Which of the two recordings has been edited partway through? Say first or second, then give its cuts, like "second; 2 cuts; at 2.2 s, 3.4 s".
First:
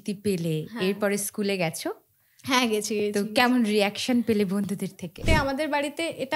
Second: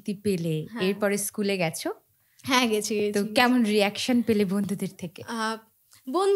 first; 1 cut; at 5.2 s